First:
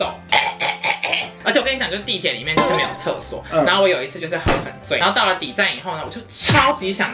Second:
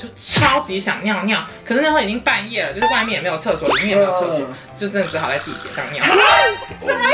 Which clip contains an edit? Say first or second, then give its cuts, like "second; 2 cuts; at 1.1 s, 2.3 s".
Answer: first; 2 cuts; at 1.3 s, 5.0 s